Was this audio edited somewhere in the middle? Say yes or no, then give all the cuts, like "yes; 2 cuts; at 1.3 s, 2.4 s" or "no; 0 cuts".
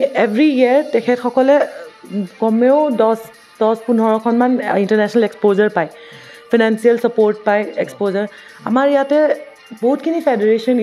no; 0 cuts